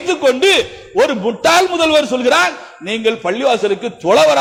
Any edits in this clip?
no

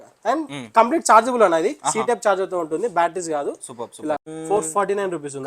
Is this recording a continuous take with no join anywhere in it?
no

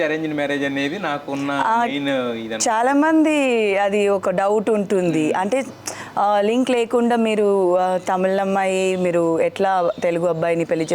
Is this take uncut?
yes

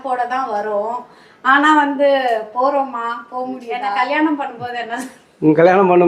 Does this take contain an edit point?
yes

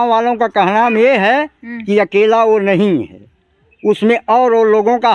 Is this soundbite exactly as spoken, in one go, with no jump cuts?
yes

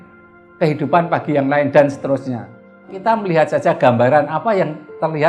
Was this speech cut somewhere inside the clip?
yes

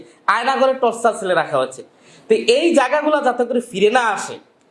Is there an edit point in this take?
no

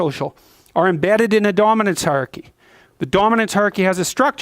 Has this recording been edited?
yes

